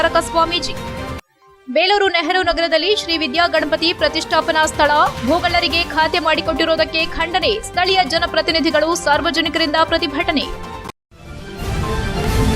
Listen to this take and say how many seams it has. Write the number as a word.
one